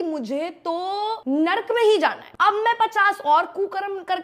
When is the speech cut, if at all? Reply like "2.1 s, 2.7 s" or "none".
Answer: 1.2 s, 2.3 s